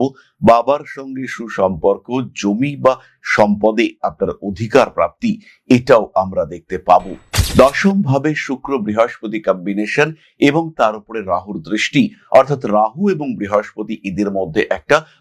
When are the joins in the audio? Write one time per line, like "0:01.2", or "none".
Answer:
0:07.3